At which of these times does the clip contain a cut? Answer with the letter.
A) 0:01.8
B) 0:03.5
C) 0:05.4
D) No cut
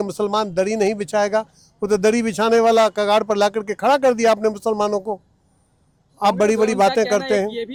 D